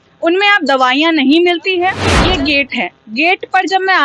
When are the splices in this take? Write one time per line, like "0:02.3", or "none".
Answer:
0:02.1